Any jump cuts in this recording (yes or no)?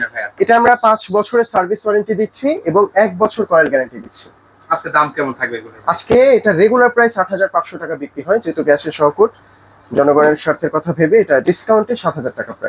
no